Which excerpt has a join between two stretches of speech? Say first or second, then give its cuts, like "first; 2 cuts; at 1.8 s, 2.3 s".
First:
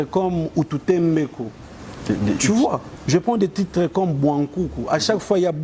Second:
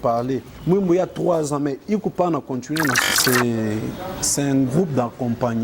second; 1 cut; at 3.2 s